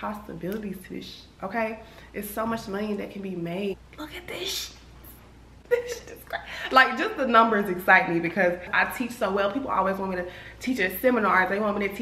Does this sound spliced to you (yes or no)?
yes